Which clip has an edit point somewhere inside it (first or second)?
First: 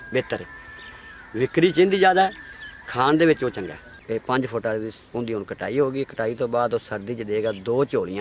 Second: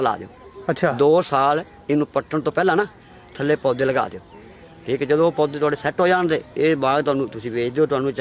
first